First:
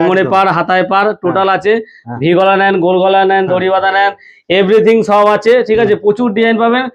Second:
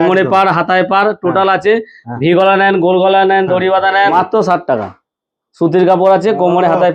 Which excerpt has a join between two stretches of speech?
second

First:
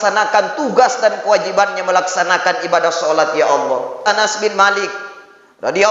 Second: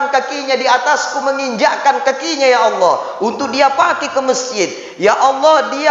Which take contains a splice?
first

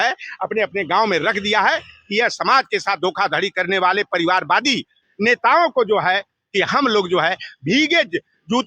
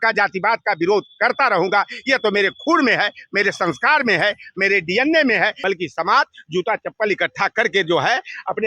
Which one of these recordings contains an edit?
second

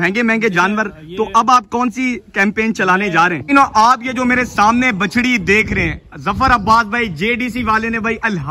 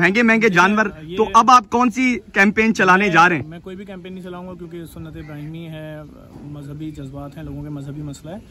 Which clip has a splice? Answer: first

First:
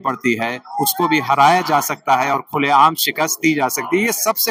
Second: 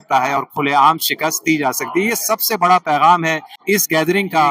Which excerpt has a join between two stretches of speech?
second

